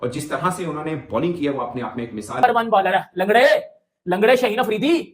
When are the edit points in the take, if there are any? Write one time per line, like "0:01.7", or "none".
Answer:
0:02.4